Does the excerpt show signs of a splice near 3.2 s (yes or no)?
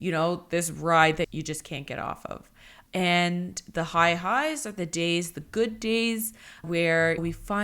no